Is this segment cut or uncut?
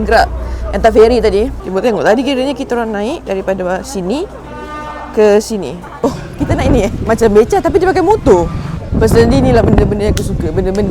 cut